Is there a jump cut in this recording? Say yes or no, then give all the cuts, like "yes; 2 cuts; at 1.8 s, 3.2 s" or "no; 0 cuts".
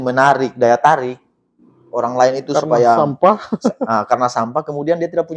no; 0 cuts